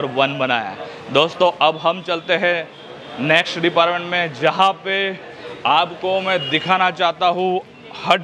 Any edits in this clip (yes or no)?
no